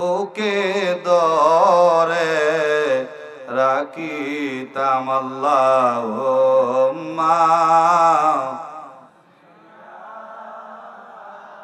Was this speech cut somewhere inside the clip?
no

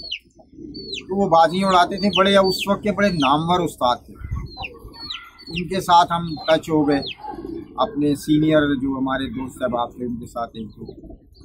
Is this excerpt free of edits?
yes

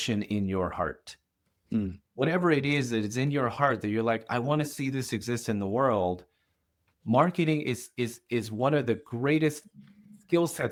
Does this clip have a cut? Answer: no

